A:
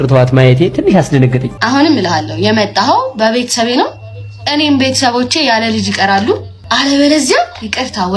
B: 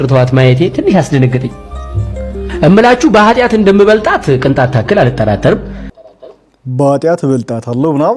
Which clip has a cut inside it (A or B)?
A